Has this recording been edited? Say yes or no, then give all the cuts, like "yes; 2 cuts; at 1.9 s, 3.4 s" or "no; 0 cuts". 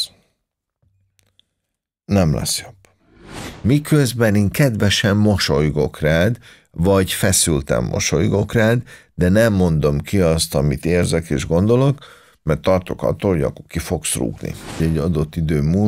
yes; 2 cuts; at 3.4 s, 14.8 s